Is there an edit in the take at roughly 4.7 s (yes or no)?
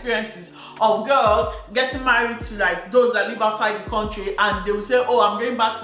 no